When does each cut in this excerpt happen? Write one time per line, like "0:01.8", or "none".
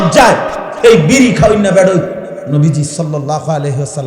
0:02.4